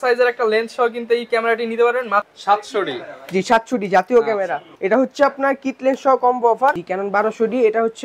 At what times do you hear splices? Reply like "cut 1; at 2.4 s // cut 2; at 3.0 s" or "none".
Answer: cut 1; at 2.2 s // cut 2; at 6.8 s